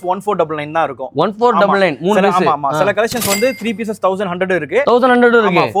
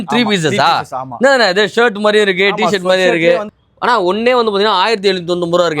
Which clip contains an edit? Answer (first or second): second